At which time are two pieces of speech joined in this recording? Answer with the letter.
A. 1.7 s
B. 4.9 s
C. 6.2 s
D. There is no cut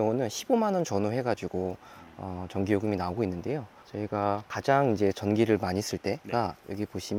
C